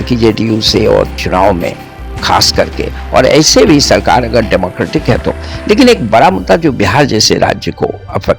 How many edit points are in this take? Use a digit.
1